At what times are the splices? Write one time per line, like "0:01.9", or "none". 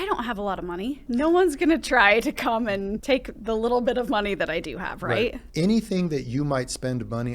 0:01.0
0:03.0
0:05.4